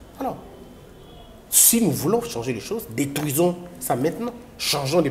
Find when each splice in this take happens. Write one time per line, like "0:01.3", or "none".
none